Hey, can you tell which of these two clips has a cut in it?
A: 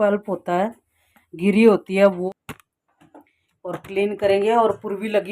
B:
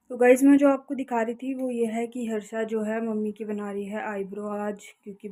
A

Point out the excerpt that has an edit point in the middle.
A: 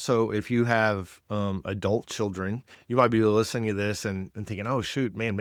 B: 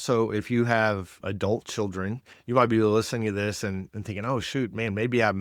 B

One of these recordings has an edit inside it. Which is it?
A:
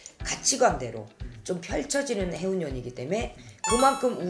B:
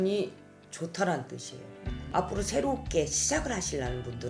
B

